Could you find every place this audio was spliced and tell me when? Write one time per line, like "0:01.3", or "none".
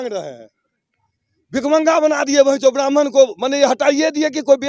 none